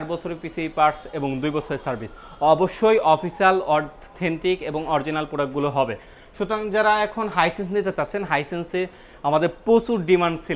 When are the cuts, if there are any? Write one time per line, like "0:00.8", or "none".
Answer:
none